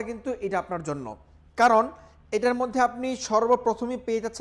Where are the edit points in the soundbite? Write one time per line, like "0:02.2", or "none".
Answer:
none